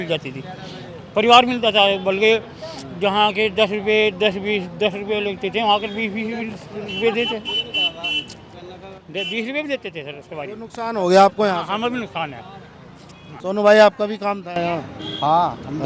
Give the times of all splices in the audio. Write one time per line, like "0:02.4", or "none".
none